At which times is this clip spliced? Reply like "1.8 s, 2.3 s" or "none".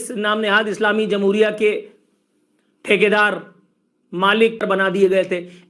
4.6 s